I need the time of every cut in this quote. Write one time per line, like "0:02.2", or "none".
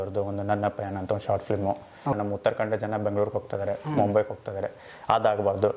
0:02.2